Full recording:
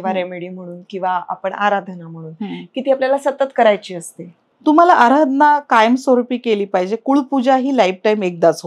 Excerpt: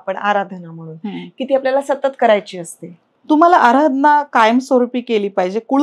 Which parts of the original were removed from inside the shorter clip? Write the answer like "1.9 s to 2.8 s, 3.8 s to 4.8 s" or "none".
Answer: none